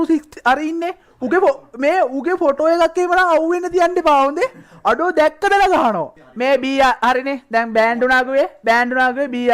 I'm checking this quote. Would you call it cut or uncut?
cut